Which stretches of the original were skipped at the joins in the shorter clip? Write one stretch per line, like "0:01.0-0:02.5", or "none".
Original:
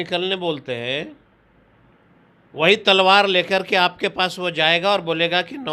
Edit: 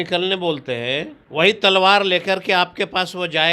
0:01.2-0:02.4